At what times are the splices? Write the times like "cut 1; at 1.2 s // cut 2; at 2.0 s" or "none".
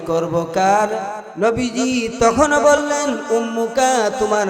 cut 1; at 1.2 s